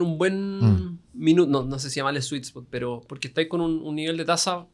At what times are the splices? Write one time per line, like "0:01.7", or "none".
none